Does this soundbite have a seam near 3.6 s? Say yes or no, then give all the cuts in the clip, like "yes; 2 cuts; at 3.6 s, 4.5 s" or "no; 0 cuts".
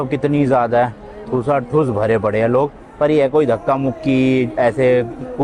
no; 0 cuts